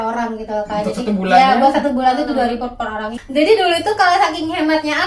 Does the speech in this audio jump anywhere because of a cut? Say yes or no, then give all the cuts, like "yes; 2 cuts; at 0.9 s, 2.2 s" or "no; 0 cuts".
yes; 1 cut; at 3.2 s